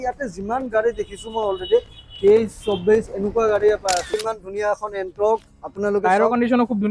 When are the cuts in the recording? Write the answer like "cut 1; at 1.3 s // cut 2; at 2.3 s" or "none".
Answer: cut 1; at 4.2 s

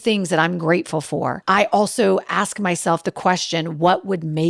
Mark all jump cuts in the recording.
cut 1; at 1.4 s

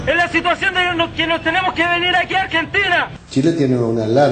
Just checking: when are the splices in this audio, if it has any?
cut 1; at 3.1 s

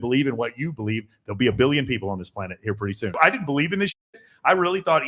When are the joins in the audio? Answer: cut 1; at 3.2 s

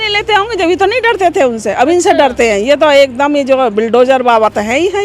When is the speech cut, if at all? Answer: none

